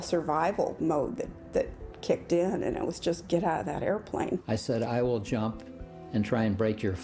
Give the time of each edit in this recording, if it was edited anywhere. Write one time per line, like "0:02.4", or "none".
0:04.4